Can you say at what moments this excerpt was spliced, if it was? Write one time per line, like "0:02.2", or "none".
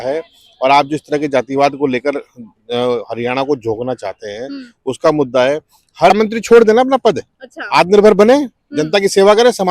0:06.1